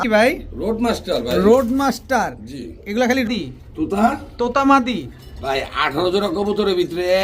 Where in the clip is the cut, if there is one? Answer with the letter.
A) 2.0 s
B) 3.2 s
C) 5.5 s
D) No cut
B